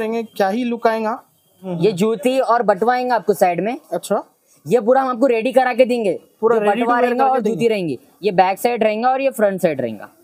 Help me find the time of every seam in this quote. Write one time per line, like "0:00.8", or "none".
0:01.6